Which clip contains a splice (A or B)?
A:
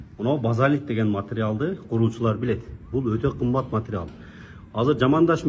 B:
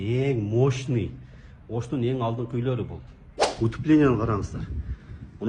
B